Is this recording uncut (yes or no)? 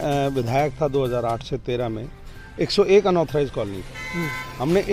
yes